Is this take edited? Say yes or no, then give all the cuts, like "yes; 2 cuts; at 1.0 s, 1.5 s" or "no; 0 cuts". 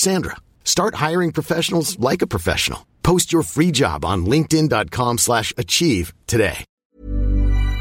no; 0 cuts